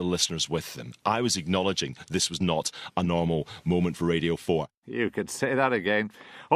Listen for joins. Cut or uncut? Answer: cut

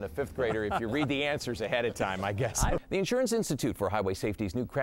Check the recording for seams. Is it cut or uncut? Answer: cut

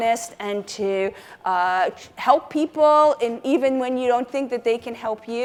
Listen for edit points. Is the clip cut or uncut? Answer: uncut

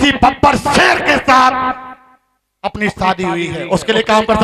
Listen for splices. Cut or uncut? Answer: uncut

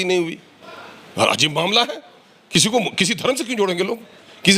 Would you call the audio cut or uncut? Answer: uncut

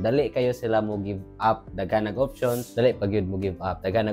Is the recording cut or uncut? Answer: uncut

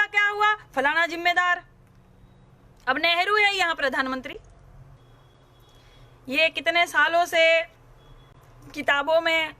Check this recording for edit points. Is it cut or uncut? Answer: cut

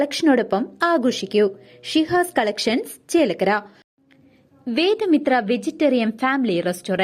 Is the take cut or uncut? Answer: cut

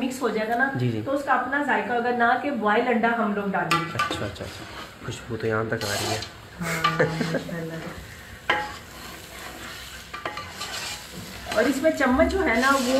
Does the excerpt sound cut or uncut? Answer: uncut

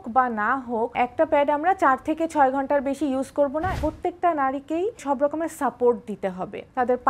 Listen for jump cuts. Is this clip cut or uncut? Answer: cut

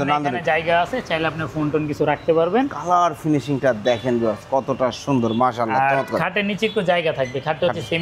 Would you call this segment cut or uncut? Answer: uncut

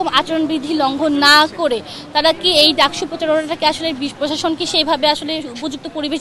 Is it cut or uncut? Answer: uncut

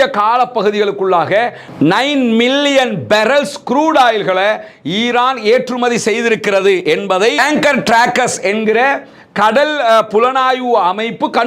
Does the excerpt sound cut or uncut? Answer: uncut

